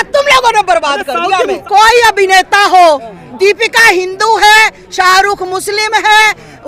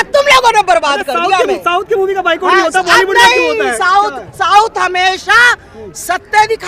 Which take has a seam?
first; 1 cut; at 1.6 s

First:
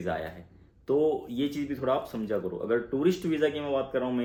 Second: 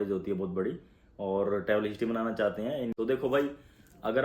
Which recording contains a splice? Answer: second; 1 cut; at 2.9 s

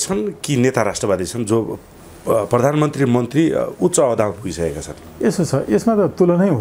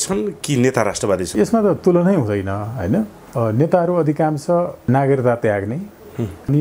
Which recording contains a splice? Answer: second; 3 cuts; at 1.3 s, 3.2 s, 4.8 s

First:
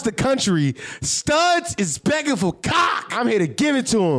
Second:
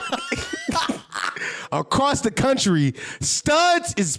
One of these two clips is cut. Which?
first; 1 cut; at 3.0 s

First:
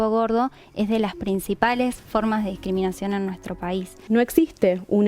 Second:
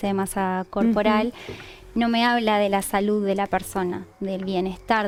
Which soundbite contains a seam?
first; 1 cut; at 4.0 s

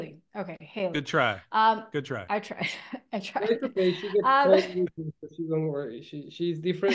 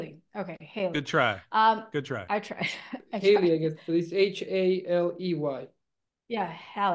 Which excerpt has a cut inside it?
second; 1 cut; at 3.0 s

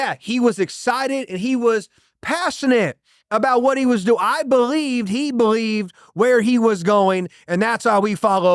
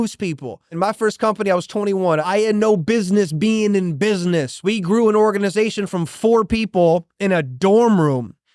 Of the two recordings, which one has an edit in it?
second; 3 cuts; at 0.8 s, 2.2 s, 4.5 s

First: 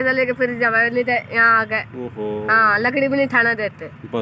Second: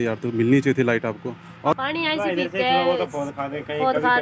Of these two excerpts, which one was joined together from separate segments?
second; 1 cut; at 1.8 s

